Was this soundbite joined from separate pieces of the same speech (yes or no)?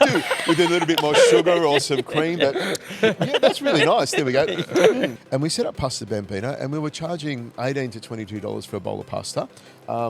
yes